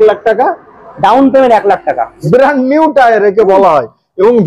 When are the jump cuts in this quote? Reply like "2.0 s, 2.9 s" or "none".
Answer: 2.2 s